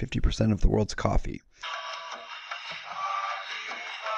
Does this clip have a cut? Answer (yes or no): no